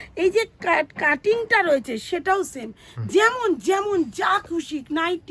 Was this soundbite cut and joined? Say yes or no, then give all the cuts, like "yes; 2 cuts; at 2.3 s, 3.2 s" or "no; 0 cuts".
no; 0 cuts